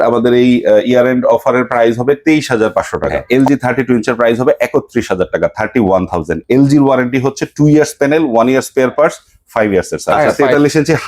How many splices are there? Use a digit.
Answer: 2